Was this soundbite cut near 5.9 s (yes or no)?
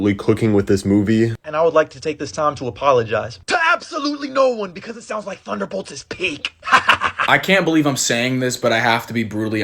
no